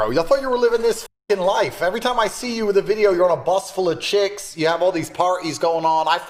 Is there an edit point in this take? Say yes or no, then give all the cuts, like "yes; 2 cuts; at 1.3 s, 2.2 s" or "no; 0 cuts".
no; 0 cuts